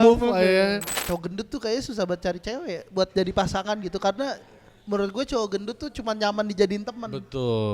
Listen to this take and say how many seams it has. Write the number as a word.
one